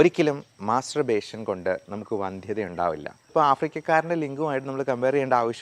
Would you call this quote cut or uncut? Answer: cut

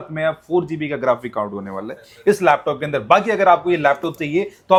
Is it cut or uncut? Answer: uncut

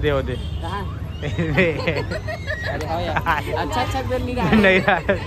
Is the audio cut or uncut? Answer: uncut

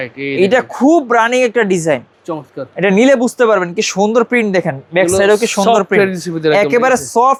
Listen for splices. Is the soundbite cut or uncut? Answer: uncut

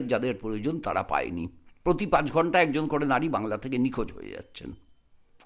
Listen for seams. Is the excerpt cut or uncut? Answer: cut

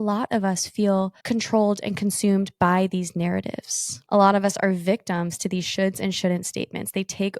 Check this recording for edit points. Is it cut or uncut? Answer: uncut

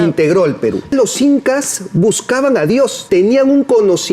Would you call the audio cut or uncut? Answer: cut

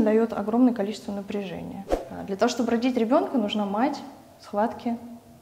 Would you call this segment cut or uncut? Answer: cut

